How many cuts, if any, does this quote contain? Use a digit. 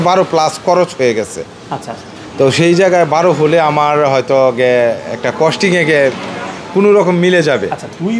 0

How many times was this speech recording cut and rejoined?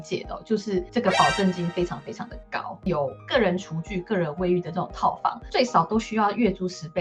2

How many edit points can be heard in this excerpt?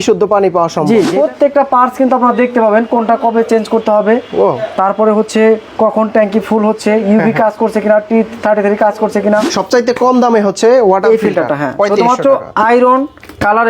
2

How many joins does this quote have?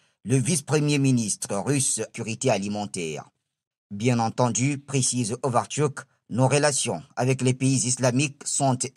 1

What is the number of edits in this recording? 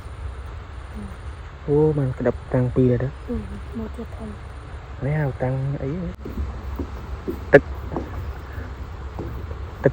1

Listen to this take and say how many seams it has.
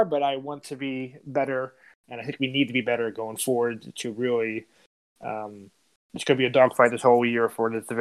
1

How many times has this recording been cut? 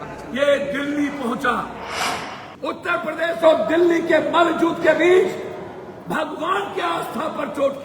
1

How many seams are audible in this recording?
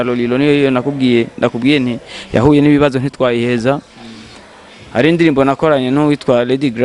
0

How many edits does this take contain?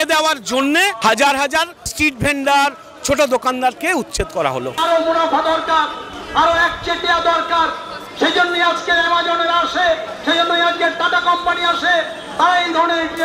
3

